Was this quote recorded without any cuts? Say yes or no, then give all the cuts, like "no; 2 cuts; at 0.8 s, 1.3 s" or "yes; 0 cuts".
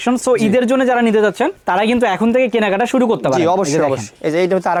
yes; 0 cuts